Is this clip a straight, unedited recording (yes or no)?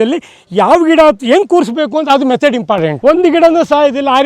no